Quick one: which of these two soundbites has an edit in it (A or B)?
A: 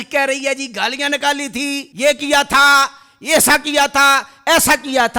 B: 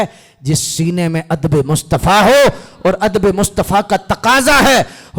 A